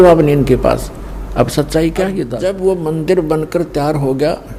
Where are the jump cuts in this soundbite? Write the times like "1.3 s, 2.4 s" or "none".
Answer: 2.3 s